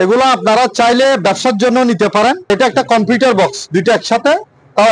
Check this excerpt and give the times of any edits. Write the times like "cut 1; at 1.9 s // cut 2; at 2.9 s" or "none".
cut 1; at 2.5 s